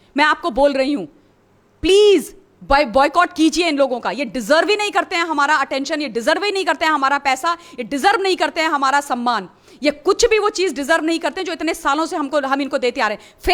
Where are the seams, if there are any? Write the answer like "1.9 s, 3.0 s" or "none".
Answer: none